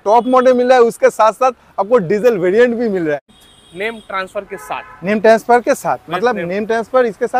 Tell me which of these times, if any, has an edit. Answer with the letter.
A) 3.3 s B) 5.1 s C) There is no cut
A